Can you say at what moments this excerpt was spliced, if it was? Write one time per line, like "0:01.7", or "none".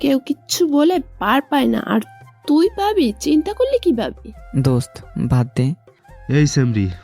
0:04.4